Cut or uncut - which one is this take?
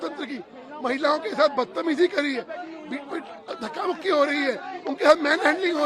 uncut